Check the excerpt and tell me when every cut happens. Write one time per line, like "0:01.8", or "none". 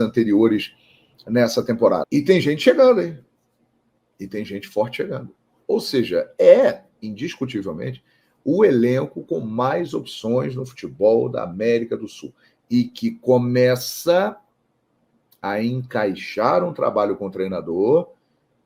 0:02.1